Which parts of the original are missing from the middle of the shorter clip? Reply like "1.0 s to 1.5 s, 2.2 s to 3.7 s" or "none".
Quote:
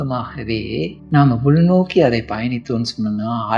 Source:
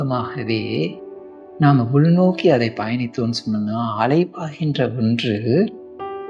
1.0 s to 1.5 s